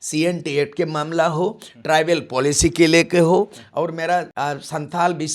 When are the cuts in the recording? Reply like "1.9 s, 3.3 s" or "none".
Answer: 4.3 s